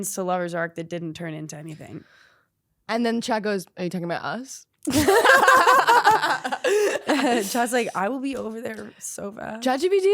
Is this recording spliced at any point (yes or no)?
yes